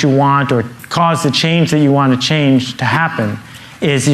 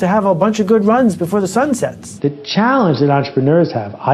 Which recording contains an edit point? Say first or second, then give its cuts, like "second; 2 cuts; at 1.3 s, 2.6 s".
second; 1 cut; at 2.0 s